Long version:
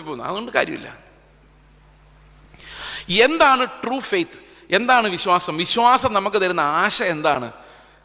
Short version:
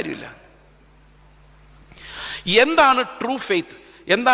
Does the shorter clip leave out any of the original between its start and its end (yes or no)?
no